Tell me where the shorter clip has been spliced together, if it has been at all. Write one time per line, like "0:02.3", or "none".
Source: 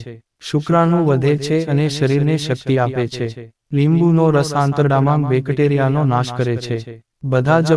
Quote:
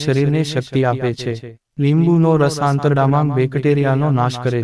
none